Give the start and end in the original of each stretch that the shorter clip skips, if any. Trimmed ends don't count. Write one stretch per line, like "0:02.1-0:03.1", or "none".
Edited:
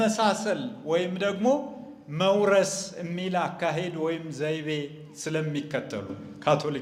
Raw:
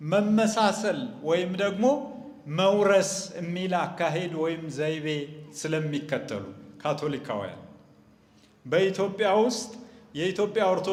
none